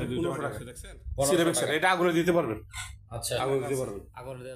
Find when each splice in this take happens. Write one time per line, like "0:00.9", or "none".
none